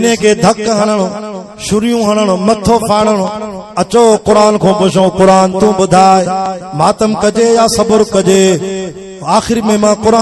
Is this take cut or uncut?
uncut